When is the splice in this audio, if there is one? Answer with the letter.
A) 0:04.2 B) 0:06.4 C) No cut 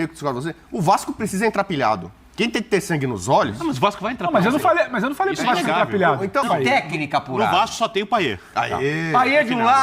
B